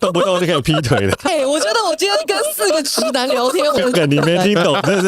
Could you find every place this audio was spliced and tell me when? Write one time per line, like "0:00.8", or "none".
0:01.3
0:03.8